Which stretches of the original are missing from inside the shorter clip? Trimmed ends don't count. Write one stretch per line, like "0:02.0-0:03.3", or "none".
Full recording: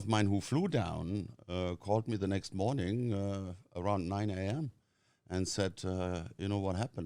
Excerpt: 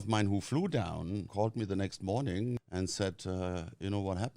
0:01.3-0:01.8
0:03.1-0:05.1